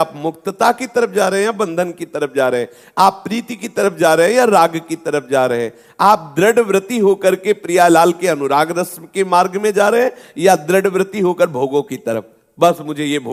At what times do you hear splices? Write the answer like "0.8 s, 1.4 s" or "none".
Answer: none